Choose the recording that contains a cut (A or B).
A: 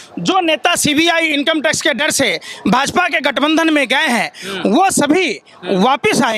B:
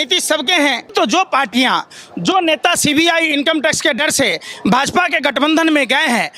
B